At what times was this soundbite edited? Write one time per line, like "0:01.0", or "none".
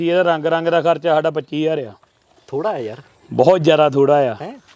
none